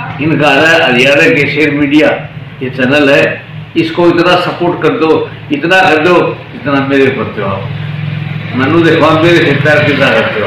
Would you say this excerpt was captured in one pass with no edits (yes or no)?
yes